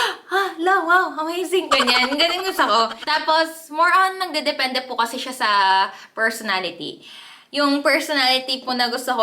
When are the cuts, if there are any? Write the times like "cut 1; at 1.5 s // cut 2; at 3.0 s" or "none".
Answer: cut 1; at 3.0 s